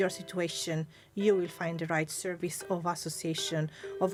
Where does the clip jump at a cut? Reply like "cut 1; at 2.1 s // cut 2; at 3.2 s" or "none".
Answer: none